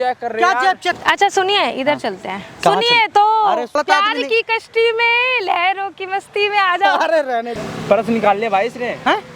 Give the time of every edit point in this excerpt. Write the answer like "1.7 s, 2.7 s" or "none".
1.0 s, 3.8 s, 7.6 s